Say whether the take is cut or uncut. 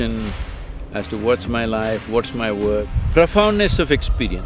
cut